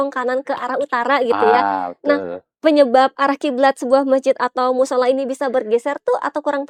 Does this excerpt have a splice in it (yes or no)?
no